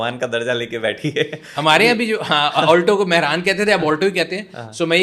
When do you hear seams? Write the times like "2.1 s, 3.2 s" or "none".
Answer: none